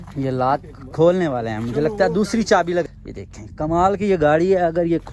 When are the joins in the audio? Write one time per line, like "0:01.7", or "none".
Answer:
0:02.8